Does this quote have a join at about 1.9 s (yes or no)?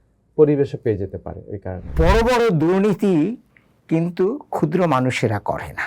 yes